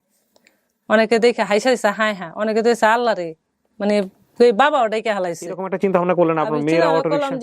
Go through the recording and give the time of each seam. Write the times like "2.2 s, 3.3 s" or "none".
5.7 s